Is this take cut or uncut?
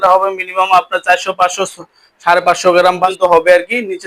cut